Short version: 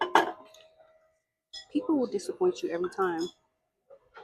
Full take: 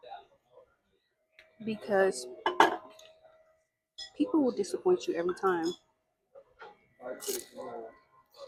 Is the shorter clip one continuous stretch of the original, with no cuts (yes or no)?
yes